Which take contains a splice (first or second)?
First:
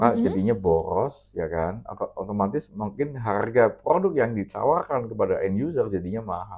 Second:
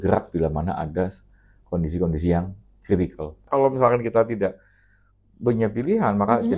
second